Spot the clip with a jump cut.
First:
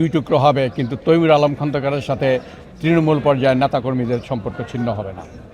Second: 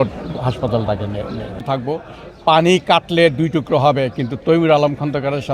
second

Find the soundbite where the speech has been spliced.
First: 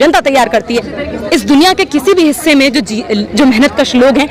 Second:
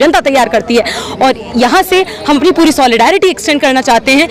first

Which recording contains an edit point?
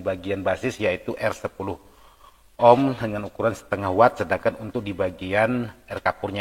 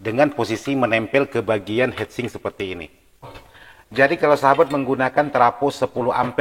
second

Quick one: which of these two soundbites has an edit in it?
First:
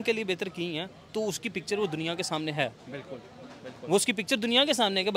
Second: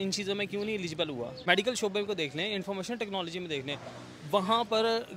second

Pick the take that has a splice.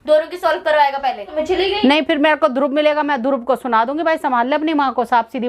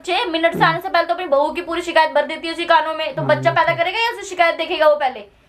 first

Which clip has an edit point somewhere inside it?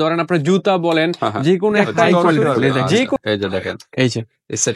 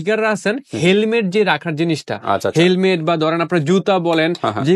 first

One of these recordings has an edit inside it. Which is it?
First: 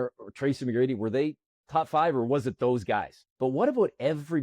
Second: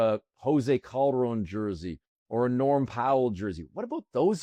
first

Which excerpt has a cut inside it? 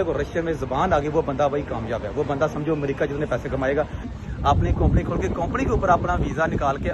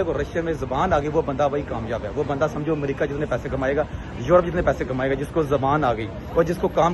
first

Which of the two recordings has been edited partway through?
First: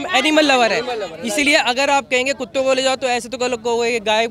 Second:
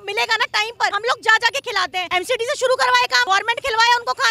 second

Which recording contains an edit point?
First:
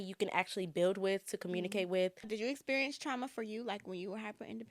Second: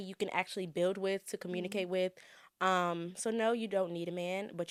first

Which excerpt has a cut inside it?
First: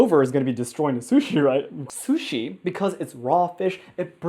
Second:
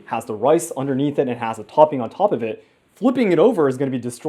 first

